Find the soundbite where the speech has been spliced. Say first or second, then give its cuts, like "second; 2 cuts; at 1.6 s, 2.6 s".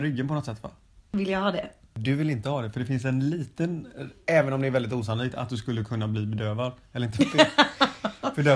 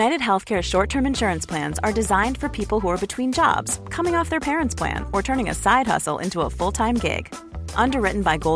first; 2 cuts; at 1.1 s, 1.9 s